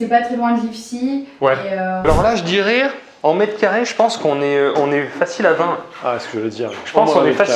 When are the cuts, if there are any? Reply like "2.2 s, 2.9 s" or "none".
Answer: 2.0 s